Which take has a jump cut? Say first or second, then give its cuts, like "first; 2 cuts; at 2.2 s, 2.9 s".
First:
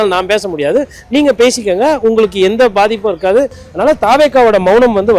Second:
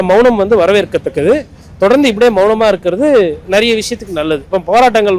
first; 1 cut; at 3.6 s